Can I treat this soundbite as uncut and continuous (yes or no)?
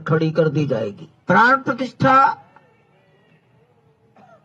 no